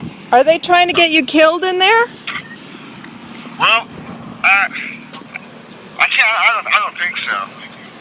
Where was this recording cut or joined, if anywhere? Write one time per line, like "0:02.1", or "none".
0:01.1